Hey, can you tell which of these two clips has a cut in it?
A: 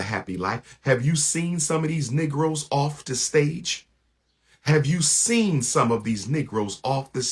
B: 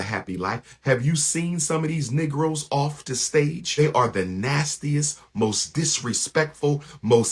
B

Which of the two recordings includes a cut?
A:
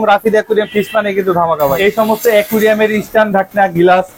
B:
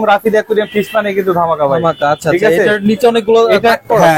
A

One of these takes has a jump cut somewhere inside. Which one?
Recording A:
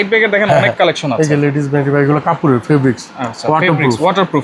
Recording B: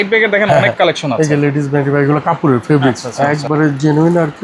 B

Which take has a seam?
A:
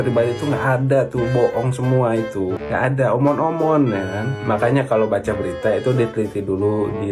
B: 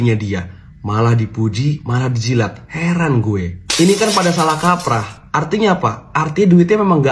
A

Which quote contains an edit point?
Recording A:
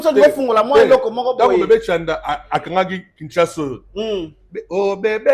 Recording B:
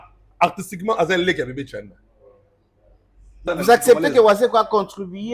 B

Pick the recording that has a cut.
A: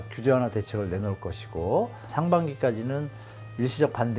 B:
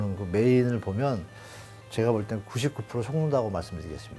A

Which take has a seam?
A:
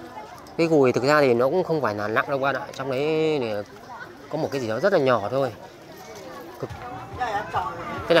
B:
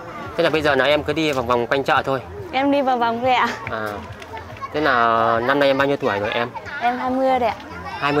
A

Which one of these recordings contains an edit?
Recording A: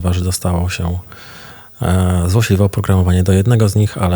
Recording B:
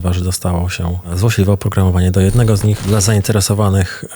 B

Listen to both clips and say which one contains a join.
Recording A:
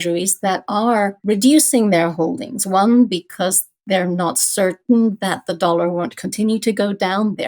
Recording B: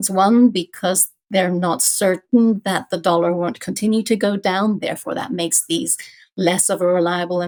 A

